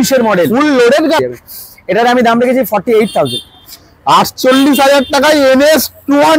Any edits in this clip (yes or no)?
yes